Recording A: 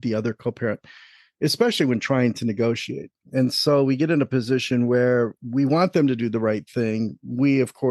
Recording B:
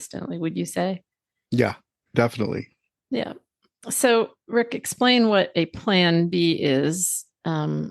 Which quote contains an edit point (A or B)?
B